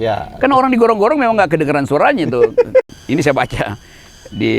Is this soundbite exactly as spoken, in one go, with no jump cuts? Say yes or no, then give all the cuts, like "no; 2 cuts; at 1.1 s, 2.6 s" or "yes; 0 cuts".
no; 1 cut; at 2.9 s